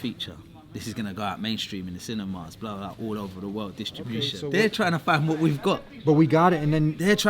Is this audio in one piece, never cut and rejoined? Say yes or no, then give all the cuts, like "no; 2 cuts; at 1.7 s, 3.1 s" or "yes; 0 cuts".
no; 1 cut; at 4.3 s